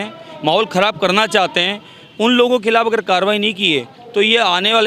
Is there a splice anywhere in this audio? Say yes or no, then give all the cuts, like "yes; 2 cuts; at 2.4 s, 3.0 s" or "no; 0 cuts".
no; 0 cuts